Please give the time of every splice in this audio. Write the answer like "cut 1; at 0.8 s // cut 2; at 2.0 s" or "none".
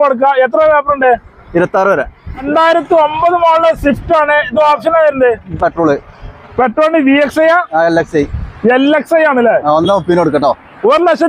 cut 1; at 2.4 s